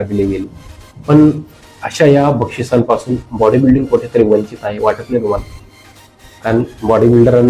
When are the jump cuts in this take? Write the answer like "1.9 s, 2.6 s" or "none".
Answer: none